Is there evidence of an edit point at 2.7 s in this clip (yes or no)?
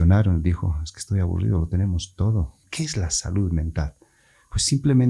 yes